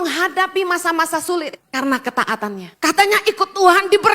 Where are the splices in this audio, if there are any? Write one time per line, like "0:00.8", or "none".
0:01.6
0:02.7